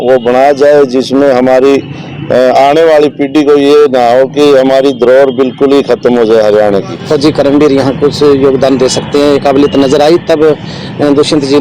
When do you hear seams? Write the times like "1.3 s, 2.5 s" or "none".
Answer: 6.9 s